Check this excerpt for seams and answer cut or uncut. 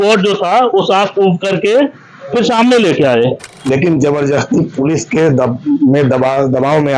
cut